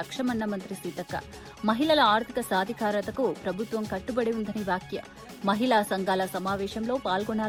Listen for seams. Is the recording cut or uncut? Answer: uncut